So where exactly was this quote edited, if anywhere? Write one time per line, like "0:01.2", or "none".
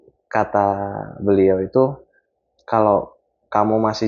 none